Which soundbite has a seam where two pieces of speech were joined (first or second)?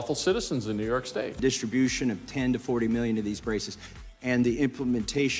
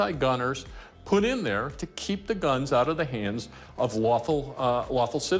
first